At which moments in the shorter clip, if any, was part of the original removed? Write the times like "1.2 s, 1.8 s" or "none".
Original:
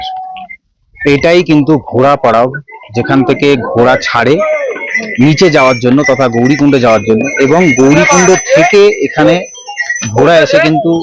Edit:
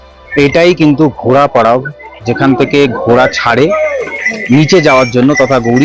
none